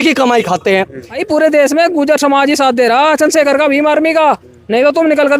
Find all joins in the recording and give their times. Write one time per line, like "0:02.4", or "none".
0:01.2